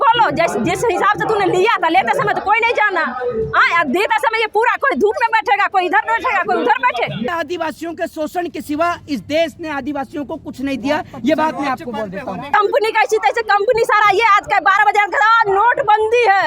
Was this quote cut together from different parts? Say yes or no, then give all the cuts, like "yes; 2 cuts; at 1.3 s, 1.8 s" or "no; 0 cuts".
yes; 2 cuts; at 7.3 s, 12.5 s